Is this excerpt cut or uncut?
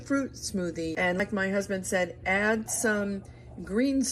cut